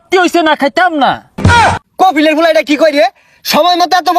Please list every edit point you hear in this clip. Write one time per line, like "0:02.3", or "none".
0:01.5